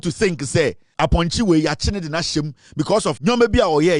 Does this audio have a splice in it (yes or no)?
yes